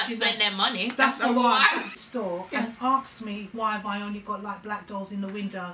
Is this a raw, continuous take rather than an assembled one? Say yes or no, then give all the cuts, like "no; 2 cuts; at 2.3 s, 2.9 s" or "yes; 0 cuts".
no; 1 cut; at 1.9 s